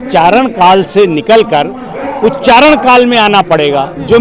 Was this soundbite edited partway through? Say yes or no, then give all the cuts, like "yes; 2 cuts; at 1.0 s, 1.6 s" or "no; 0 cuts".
no; 0 cuts